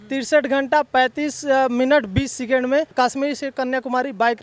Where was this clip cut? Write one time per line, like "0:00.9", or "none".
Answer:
0:02.9